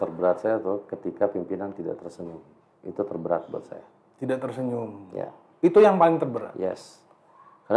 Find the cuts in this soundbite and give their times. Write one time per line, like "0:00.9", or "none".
none